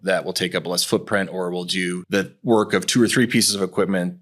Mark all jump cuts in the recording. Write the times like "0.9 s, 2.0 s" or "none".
2.0 s